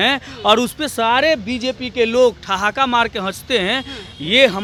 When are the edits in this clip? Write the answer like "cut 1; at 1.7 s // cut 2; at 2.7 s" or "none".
none